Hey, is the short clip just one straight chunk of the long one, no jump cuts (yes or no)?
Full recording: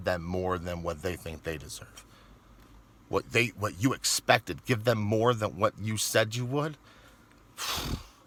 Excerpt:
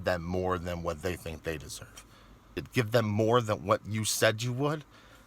no